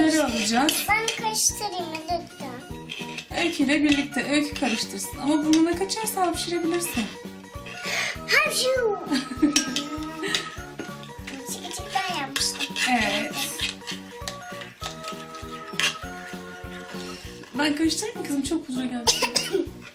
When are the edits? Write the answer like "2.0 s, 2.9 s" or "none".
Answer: 6.8 s